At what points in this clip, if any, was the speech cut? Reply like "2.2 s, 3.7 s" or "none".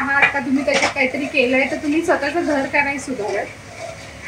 none